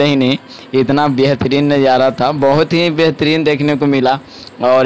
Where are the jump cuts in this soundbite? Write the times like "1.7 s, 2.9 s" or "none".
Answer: none